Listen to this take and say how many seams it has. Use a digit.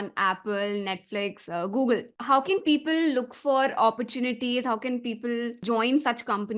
2